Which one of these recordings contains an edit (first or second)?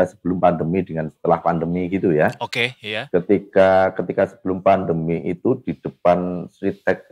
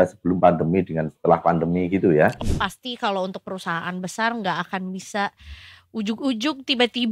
second